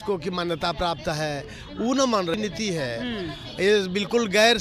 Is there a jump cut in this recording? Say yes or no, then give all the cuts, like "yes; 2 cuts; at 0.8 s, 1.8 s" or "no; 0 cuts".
yes; 1 cut; at 2.4 s